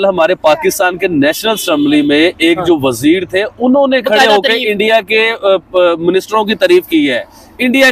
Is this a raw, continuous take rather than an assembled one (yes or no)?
yes